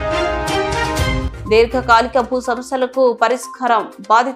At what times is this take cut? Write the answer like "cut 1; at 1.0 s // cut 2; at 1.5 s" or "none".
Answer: cut 1; at 1.3 s